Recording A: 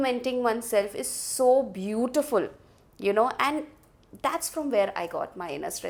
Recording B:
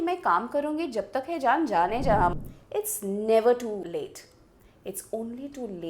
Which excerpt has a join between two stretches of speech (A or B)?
B